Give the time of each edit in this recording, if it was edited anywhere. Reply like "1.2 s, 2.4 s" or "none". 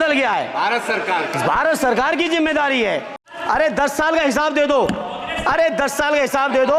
3.2 s